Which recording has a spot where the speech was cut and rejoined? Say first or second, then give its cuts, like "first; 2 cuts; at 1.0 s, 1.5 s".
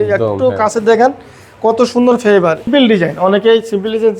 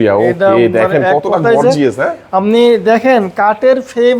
first; 1 cut; at 2.7 s